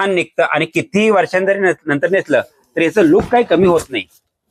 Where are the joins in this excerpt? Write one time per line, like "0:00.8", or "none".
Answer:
none